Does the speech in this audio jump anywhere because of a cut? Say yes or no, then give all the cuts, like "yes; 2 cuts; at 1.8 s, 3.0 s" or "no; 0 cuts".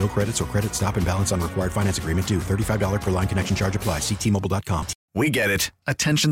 yes; 1 cut; at 5.0 s